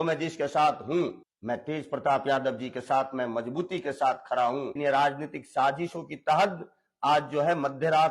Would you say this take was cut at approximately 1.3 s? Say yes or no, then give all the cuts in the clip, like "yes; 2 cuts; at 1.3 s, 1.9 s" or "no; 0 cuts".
yes; 2 cuts; at 1.3 s, 4.7 s